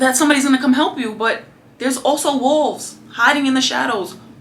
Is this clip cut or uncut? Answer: uncut